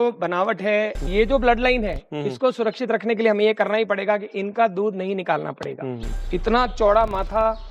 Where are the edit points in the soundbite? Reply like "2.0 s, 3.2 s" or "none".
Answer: 1.0 s, 6.2 s